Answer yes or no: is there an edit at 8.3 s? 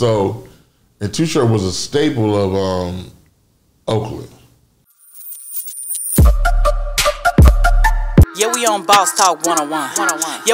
no